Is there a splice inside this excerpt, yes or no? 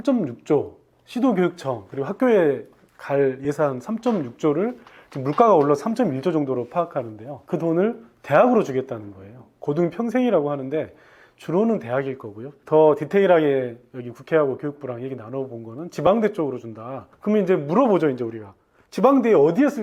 no